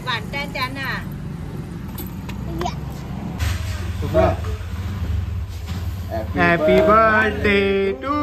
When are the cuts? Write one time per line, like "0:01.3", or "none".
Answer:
0:03.4